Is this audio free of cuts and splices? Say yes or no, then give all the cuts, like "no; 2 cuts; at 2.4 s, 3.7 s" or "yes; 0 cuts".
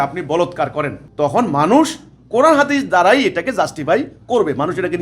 no; 1 cut; at 1.0 s